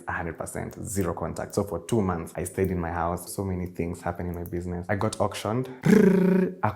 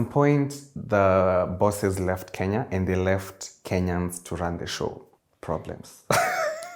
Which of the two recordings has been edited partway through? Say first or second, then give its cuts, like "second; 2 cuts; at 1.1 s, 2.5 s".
first; 4 cuts; at 2.3 s, 3.3 s, 4.9 s, 5.8 s